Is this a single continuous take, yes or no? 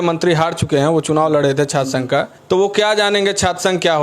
no